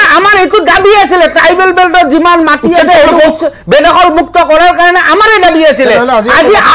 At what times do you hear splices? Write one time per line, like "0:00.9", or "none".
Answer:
none